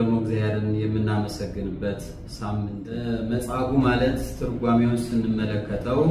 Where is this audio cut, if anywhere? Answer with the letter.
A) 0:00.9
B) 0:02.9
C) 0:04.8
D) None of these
B